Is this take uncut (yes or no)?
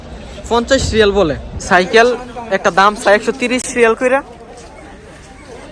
no